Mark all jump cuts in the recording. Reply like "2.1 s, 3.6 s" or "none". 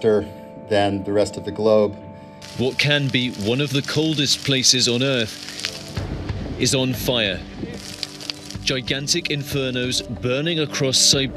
2.5 s